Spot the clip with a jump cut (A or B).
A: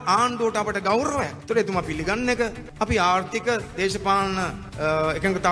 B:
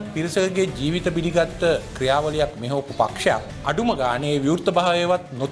A